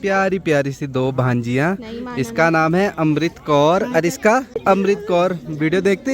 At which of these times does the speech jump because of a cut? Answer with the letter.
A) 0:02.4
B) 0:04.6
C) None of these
B